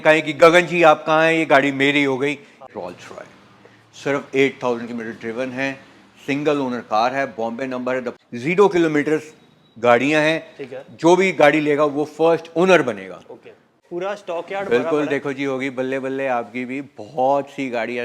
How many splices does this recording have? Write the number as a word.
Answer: three